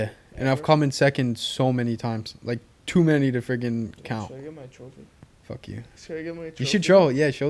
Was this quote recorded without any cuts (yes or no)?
yes